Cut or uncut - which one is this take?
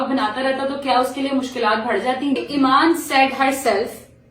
cut